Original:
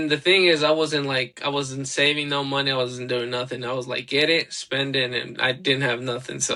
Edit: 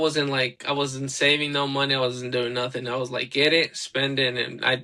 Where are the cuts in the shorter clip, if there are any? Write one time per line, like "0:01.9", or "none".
none